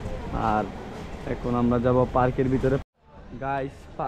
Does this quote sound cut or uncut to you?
cut